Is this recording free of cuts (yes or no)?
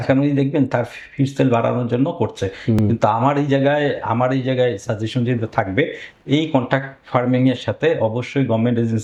yes